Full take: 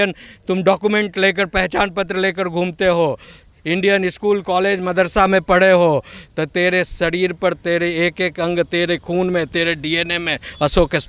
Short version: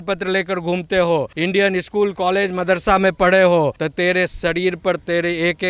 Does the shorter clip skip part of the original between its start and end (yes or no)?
yes